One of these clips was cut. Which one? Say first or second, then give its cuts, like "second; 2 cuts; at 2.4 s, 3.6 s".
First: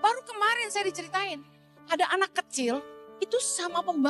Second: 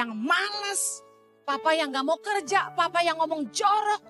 first; 2 cuts; at 1.7 s, 3.0 s